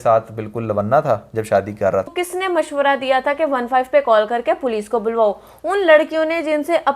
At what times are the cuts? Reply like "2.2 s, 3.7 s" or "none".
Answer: 2.2 s